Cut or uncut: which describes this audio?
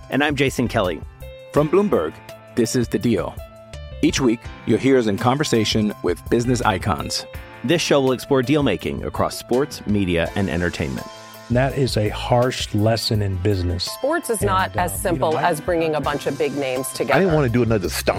uncut